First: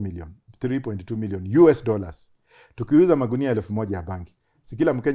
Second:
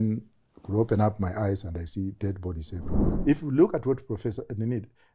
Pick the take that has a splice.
second; 1 cut; at 2.9 s

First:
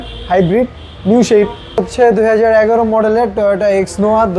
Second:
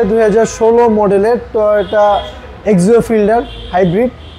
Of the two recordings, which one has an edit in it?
first; 1 cut; at 1.9 s

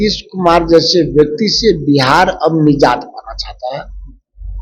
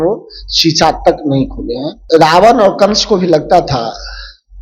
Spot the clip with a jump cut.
second; 1 cut; at 1.9 s

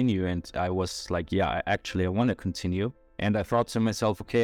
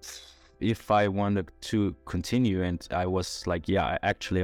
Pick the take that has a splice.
first; 1 cut; at 3.0 s

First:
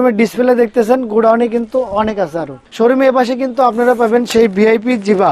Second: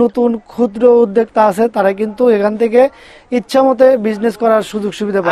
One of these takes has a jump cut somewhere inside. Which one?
first; 1 cut; at 2.6 s

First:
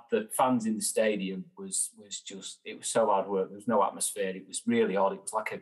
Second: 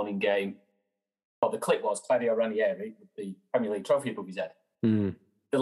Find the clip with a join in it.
second; 1 cut; at 0.9 s

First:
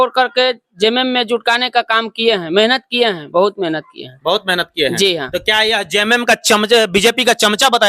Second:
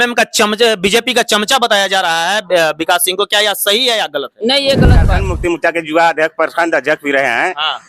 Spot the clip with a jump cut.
second; 1 cut; at 5.2 s

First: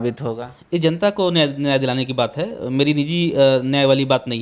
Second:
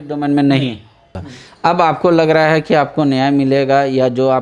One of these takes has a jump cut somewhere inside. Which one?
second; 1 cut; at 1.1 s

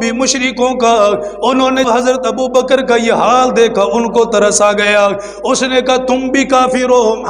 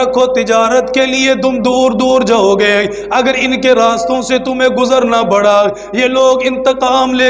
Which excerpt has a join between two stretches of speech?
first; 1 cut; at 1.9 s

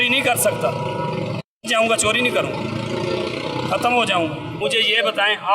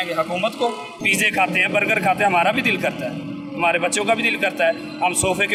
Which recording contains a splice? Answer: first; 1 cut; at 4.5 s

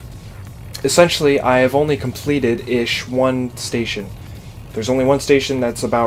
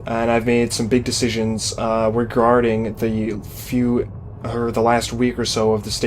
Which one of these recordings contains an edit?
second; 1 cut; at 1.5 s

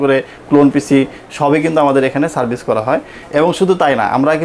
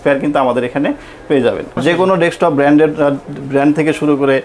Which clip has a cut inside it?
second; 1 cut; at 1.8 s

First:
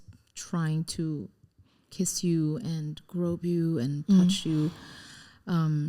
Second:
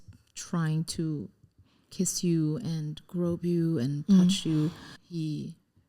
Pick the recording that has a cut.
second; 1 cut; at 5.0 s

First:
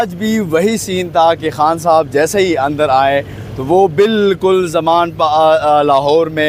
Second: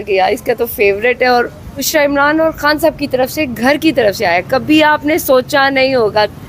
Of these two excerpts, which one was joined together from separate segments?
second; 1 cut; at 1.9 s

